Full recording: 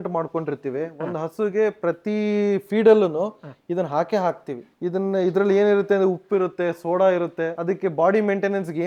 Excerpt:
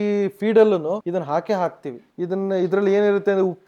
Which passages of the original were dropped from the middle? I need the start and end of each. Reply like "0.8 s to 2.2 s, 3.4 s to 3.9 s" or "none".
3.3 s to 3.7 s